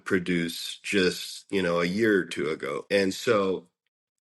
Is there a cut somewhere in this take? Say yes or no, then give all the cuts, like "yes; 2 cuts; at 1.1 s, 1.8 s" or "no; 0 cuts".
yes; 1 cut; at 2.8 s